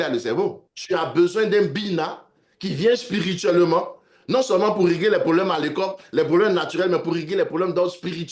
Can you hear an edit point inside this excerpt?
no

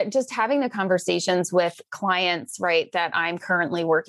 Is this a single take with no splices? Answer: yes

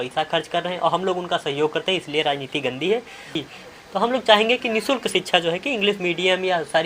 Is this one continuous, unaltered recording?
no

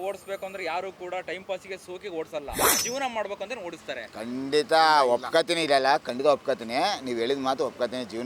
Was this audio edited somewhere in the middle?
no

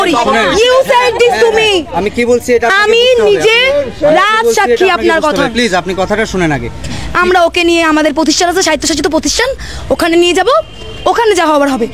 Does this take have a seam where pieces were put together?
yes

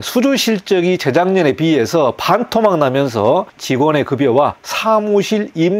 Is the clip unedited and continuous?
no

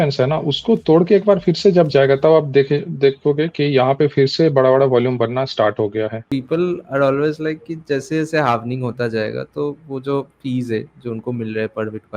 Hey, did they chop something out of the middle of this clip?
yes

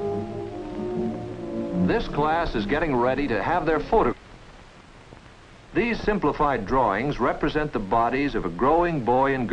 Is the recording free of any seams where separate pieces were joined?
yes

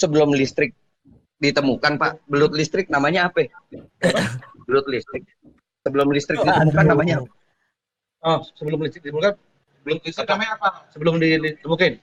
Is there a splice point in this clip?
no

